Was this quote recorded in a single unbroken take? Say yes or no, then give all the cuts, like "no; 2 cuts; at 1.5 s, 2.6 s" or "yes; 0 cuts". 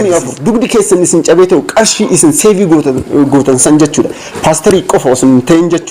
yes; 0 cuts